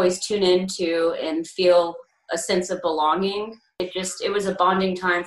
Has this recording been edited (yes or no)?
yes